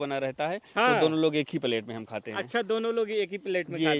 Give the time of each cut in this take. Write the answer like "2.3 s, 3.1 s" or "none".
none